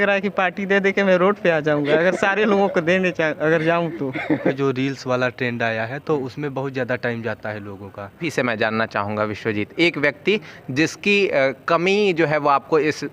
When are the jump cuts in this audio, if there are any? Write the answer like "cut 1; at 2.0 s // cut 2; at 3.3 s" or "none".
cut 1; at 4.5 s // cut 2; at 8.3 s